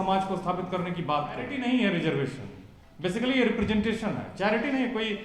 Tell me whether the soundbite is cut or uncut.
cut